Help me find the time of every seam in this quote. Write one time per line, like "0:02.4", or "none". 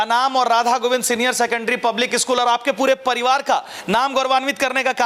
none